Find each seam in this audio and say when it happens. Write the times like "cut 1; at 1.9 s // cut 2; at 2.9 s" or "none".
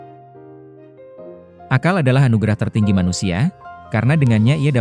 cut 1; at 1.7 s